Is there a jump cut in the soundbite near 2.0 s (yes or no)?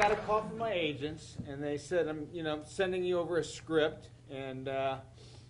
no